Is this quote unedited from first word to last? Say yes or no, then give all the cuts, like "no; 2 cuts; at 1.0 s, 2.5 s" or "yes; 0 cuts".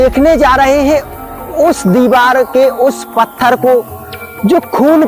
yes; 0 cuts